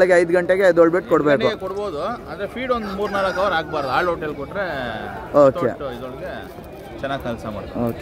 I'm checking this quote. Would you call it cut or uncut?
uncut